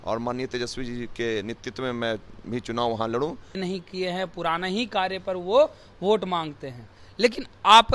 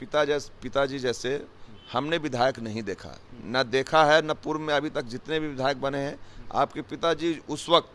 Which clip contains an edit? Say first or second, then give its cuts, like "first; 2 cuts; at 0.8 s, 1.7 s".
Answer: first; 1 cut; at 3.6 s